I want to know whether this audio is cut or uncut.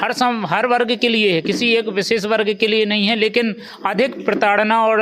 uncut